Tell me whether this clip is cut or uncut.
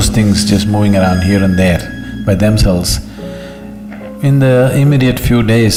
uncut